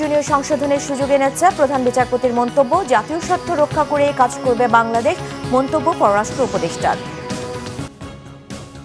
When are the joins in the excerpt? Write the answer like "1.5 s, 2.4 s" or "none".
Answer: 7.9 s